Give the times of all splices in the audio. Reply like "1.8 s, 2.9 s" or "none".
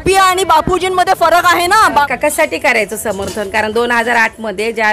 2.1 s